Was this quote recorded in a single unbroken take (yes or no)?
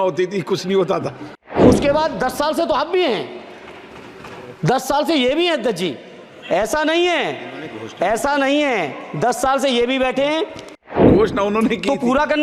no